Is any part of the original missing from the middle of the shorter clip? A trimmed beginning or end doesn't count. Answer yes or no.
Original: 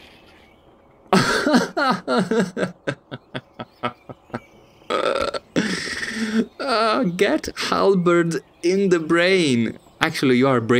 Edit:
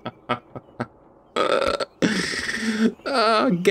no